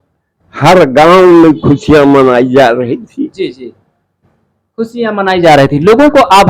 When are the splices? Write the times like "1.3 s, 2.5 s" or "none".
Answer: none